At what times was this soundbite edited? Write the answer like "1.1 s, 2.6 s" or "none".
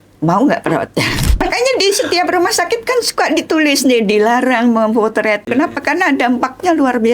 1.4 s, 5.5 s